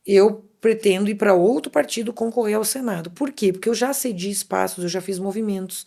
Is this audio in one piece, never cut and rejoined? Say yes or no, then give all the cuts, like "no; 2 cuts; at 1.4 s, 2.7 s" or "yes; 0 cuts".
yes; 0 cuts